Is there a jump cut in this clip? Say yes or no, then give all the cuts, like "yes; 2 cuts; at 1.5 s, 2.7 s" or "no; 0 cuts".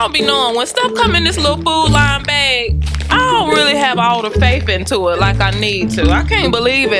no; 0 cuts